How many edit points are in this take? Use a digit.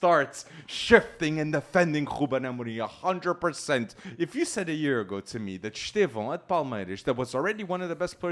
1